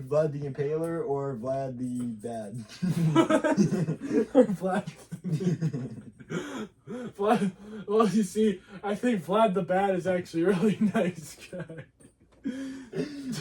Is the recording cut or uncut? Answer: uncut